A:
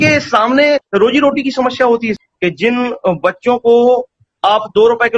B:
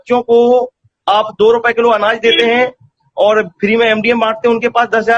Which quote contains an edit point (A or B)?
A